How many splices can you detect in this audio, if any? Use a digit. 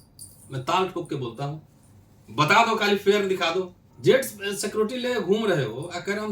1